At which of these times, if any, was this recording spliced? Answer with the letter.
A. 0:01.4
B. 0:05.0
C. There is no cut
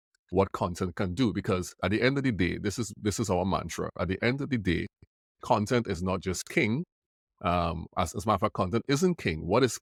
C